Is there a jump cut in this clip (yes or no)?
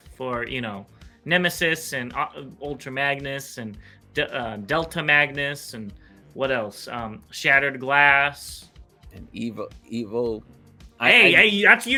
no